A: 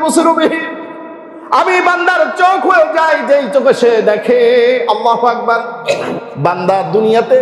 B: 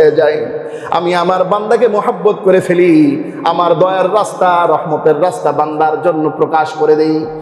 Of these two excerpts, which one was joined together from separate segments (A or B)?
A